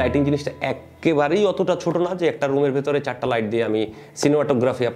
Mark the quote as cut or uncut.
uncut